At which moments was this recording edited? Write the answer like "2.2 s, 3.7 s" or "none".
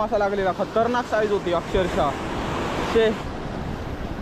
3.3 s